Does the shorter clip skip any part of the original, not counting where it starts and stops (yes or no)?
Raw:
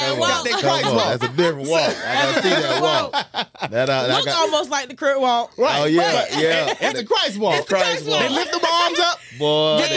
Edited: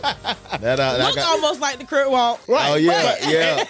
no